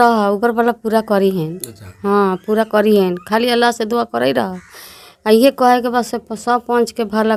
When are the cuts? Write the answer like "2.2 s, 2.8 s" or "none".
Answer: none